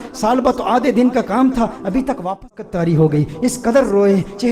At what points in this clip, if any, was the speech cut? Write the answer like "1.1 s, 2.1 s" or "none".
2.4 s